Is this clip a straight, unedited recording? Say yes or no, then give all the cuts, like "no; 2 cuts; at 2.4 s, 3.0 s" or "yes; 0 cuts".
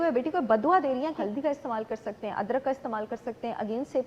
no; 1 cut; at 1.2 s